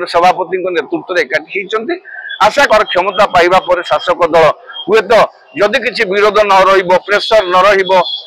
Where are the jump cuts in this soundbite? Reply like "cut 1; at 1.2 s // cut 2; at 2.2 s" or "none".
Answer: cut 1; at 2.7 s

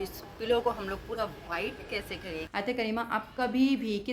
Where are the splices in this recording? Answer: cut 1; at 2.4 s

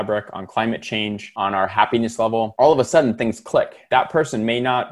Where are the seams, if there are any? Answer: cut 1; at 1.2 s // cut 2; at 2.5 s // cut 3; at 3.8 s

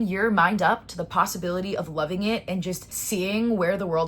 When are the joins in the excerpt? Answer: cut 1; at 2.9 s

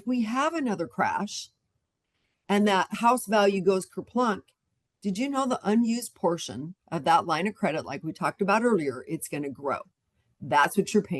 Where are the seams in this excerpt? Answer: none

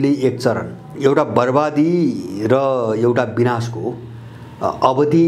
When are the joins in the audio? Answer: cut 1; at 0.9 s

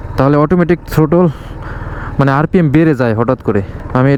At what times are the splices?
none

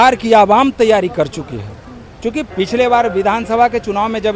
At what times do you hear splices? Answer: cut 1; at 2.4 s

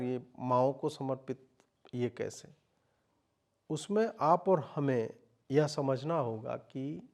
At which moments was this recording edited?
none

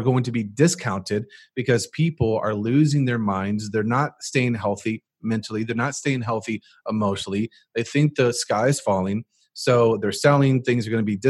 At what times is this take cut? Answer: none

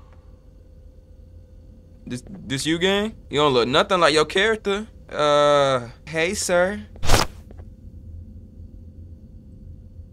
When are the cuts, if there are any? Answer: cut 1; at 3.2 s // cut 2; at 5.0 s // cut 3; at 6.0 s

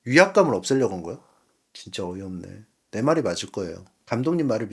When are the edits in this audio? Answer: none

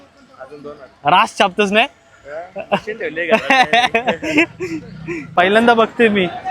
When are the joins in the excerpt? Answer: cut 1; at 5.3 s

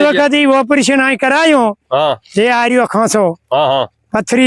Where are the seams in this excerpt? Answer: none

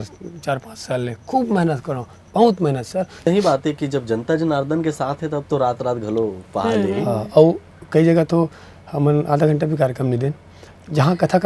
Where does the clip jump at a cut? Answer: cut 1; at 3.2 s

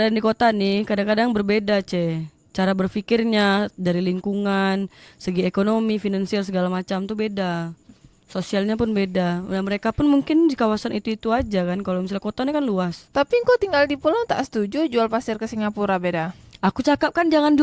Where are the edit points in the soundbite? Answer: none

